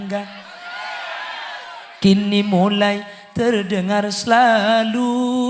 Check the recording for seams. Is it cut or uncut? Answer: uncut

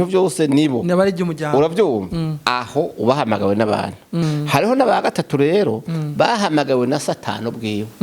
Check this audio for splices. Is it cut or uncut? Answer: cut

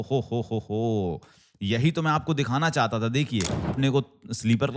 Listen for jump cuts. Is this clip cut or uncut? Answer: cut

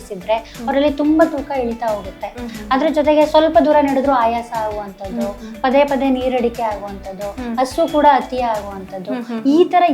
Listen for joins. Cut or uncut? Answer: uncut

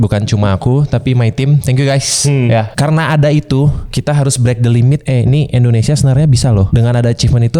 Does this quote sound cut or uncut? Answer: cut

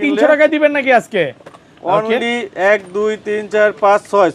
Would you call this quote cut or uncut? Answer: uncut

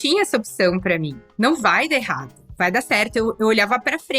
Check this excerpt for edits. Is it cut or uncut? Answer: cut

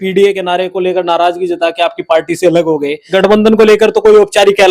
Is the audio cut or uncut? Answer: cut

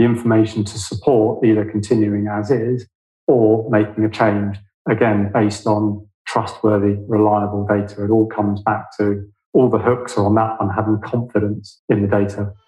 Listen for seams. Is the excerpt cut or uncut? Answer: cut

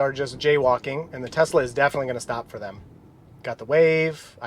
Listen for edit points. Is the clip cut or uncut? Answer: uncut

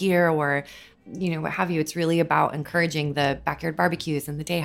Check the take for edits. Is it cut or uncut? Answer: uncut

